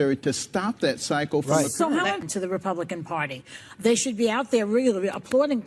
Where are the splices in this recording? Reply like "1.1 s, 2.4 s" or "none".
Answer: 2.3 s

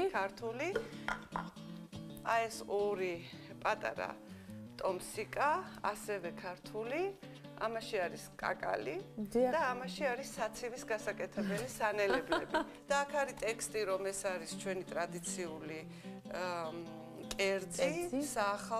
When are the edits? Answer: 9.9 s

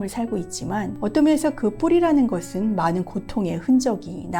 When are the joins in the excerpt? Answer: 0.9 s

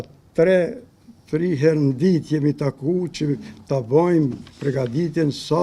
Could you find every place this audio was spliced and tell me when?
none

